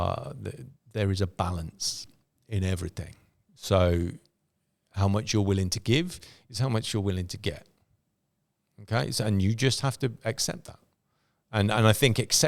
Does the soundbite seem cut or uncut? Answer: uncut